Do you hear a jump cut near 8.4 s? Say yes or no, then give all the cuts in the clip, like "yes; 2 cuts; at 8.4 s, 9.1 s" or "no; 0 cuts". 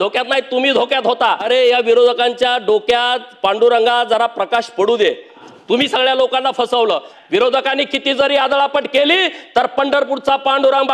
no; 3 cuts; at 1.4 s, 5.4 s, 7.1 s